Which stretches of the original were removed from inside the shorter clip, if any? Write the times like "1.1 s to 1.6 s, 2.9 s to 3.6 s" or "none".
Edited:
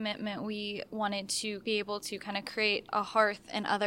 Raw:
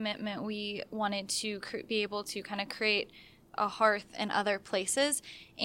1.6 s to 1.8 s, 3.1 s to 3.5 s